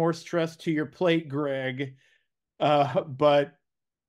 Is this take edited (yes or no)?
no